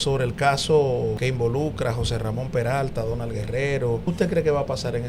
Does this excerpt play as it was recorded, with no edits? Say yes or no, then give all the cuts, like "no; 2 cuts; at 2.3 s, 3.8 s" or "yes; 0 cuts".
no; 2 cuts; at 1.2 s, 4.0 s